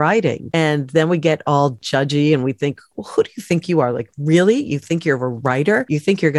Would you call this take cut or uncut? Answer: uncut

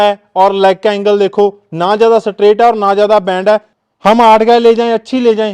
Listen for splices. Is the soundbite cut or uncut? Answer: cut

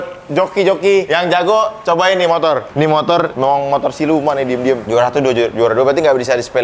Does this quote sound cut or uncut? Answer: cut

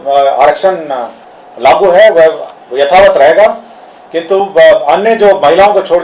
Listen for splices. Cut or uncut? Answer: uncut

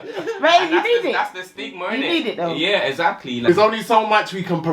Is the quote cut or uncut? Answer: cut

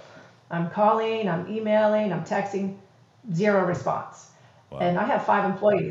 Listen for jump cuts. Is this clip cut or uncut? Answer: uncut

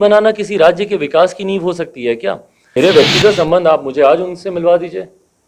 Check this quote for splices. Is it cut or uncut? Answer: cut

